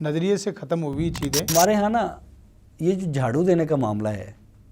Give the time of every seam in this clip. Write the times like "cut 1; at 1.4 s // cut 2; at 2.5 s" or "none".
cut 1; at 1.5 s